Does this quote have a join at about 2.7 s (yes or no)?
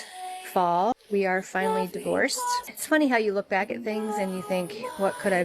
yes